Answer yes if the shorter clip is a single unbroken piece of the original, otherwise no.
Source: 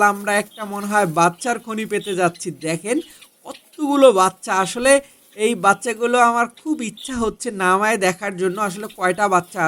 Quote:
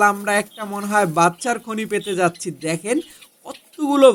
yes